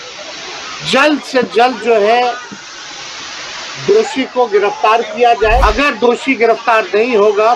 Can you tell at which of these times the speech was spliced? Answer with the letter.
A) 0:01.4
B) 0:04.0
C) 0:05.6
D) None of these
C